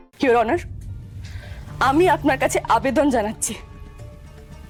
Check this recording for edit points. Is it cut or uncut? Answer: uncut